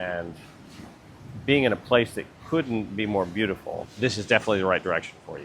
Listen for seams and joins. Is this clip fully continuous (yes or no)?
no